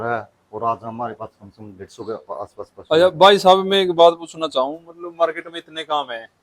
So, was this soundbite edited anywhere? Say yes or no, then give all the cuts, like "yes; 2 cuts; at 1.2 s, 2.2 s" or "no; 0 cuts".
no; 0 cuts